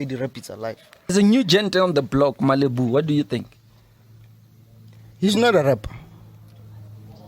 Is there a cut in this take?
yes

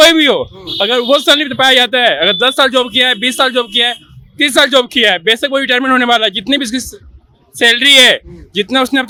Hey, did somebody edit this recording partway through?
no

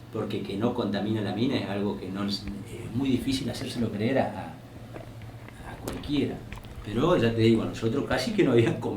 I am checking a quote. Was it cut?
no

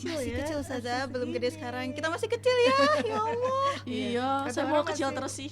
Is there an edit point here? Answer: no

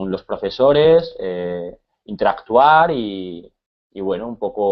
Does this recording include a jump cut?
no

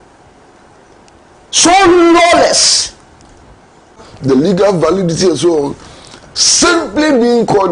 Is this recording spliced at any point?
yes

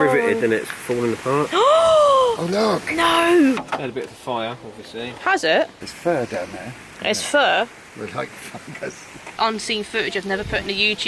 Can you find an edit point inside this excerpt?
yes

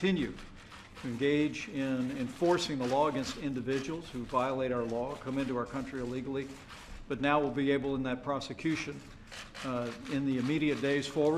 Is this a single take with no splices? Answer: yes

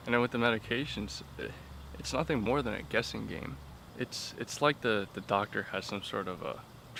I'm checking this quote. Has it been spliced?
no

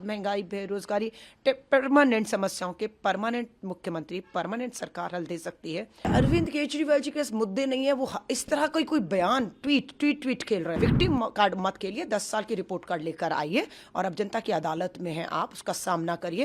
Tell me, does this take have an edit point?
yes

